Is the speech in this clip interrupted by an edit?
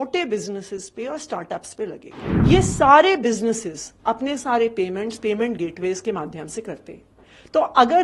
yes; 1 cut; at 2.5 s

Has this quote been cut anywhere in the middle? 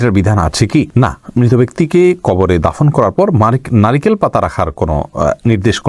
no; 0 cuts

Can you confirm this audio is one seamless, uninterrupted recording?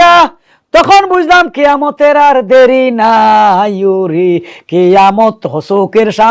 yes; 0 cuts

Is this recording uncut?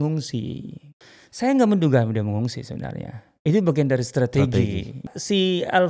no; 2 cuts; at 0.9 s, 5.0 s

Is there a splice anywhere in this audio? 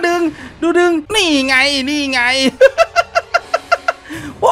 yes; 1 cut; at 1.1 s

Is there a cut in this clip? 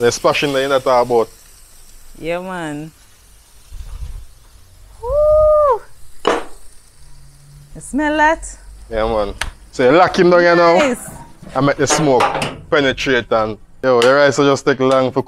yes; 1 cut; at 13.8 s

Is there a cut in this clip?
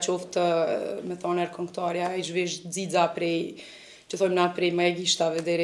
no; 0 cuts

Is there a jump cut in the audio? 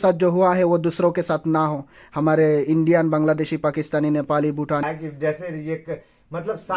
yes; 1 cut; at 4.8 s

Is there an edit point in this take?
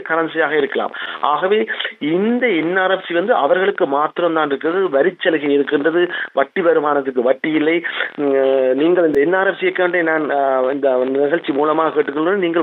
no; 0 cuts

